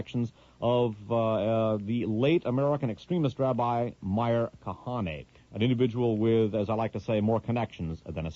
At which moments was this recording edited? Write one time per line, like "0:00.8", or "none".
none